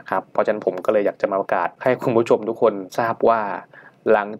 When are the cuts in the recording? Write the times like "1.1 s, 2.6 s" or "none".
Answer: 1.7 s, 2.9 s